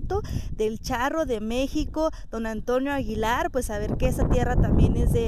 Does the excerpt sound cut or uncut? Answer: uncut